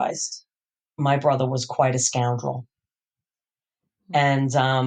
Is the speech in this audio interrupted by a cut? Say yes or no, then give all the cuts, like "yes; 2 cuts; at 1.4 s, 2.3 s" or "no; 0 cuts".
no; 0 cuts